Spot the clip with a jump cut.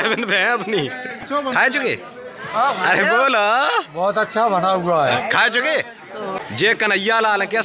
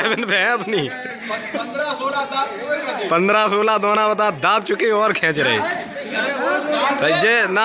first; 2 cuts; at 1.2 s, 6.3 s

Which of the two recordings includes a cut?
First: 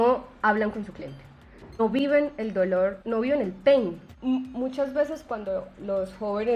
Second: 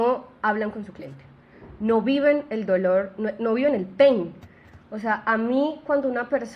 first; 3 cuts; at 1.8 s, 3.0 s, 4.1 s

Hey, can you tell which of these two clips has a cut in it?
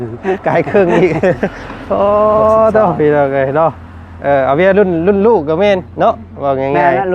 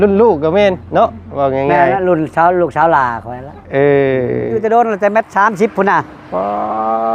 second; 1 cut; at 4.6 s

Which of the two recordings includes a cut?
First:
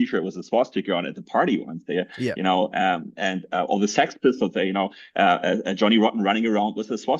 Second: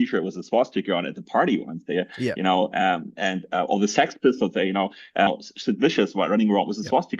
second; 1 cut; at 5.3 s

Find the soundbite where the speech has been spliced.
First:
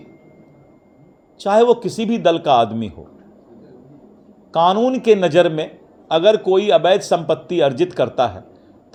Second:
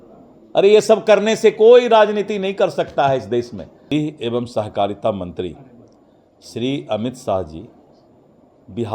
second; 1 cut; at 3.9 s

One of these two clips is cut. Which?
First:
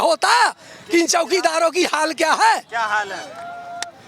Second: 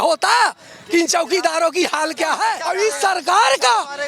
second; 1 cut; at 2.6 s

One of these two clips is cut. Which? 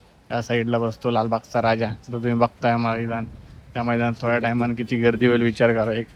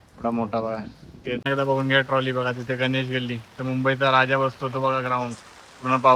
second; 1 cut; at 1.4 s

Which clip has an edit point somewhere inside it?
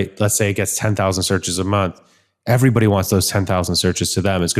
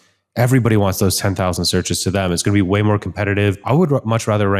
second; 1 cut; at 3.5 s

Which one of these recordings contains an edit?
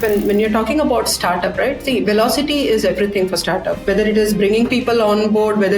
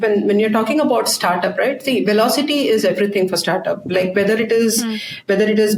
first; 1 cut; at 3.7 s

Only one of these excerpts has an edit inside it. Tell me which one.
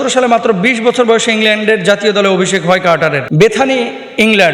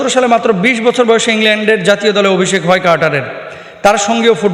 first; 1 cut; at 3.2 s

